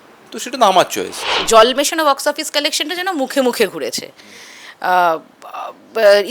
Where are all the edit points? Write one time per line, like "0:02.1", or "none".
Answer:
0:01.4